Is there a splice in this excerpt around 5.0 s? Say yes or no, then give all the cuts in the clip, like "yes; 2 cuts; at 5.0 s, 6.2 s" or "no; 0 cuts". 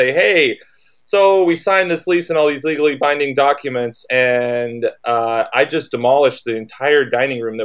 no; 0 cuts